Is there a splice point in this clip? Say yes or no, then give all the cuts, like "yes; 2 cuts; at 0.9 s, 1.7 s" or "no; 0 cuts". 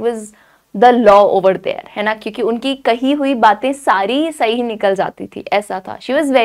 no; 0 cuts